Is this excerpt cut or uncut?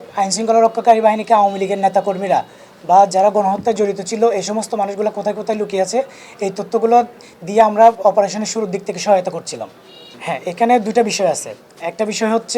uncut